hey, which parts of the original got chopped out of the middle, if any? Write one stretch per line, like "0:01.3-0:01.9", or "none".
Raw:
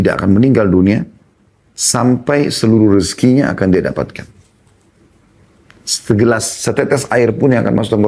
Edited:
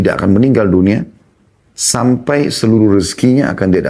none